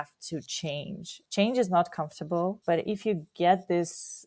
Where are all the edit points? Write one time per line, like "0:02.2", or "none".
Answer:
0:01.1
0:02.6